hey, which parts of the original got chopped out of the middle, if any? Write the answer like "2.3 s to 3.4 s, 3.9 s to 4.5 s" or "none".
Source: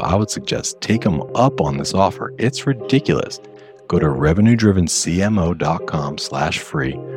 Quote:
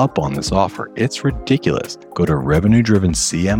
3.4 s to 3.7 s